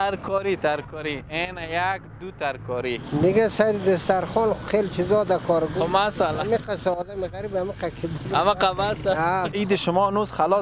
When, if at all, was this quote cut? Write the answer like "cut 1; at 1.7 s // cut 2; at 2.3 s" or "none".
cut 1; at 3.0 s // cut 2; at 9.5 s